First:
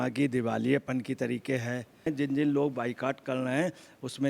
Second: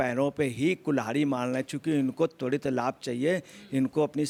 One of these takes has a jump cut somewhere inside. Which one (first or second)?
first